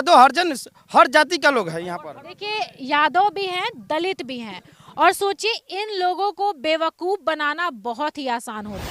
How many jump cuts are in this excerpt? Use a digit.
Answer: 0